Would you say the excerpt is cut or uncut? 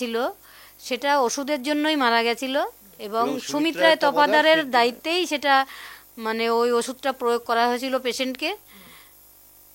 uncut